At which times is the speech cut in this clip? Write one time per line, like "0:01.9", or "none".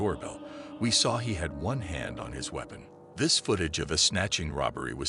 0:03.0